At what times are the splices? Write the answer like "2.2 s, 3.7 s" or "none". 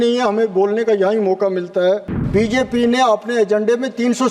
2.1 s